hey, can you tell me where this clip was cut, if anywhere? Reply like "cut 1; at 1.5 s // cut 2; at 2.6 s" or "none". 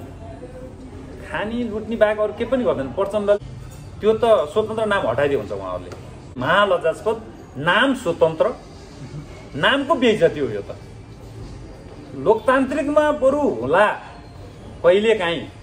cut 1; at 3.4 s // cut 2; at 6.4 s